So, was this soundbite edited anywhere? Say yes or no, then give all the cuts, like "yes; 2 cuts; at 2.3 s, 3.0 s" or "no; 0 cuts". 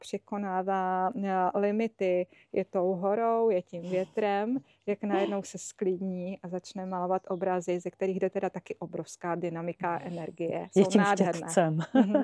no; 0 cuts